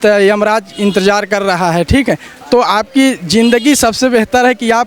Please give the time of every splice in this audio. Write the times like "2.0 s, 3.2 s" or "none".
none